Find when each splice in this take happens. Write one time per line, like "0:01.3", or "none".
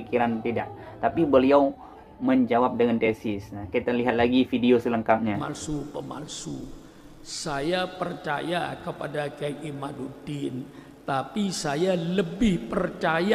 0:05.4